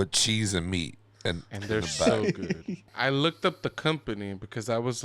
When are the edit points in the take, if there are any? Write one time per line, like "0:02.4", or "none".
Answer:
0:02.9